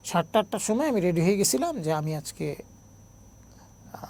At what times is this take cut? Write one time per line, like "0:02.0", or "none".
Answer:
none